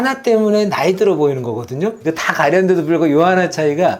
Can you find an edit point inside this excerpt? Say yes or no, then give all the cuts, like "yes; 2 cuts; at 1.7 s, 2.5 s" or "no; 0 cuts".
yes; 1 cut; at 2.0 s